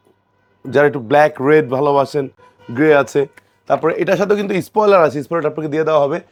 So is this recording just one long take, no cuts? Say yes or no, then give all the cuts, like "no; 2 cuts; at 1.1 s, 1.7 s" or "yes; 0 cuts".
yes; 0 cuts